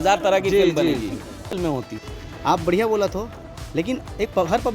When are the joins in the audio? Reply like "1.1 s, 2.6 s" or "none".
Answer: 1.5 s